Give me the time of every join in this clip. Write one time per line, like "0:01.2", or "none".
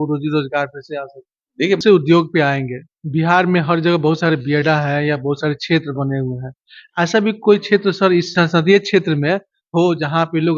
0:01.8